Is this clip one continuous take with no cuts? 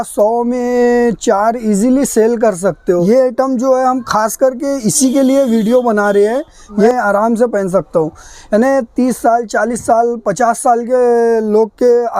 no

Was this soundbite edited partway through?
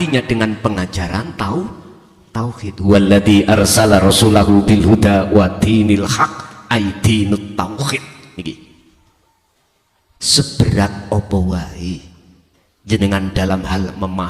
yes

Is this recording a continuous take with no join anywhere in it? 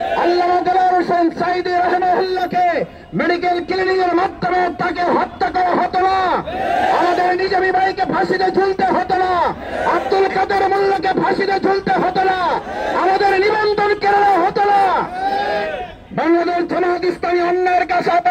no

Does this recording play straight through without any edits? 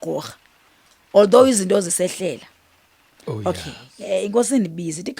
no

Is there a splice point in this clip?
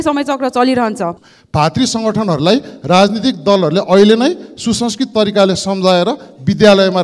yes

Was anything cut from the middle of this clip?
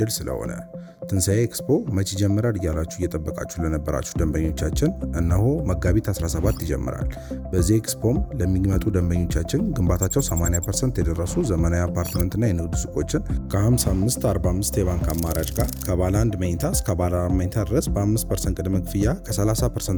no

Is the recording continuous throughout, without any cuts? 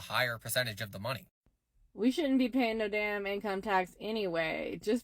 no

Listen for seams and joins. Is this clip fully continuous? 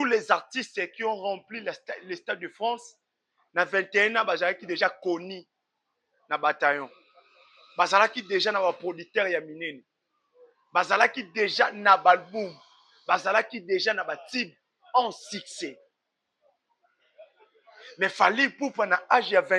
yes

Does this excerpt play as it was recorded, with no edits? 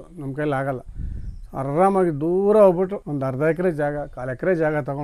no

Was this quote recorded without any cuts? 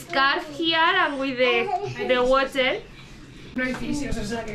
yes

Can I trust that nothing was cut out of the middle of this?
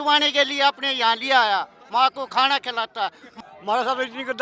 no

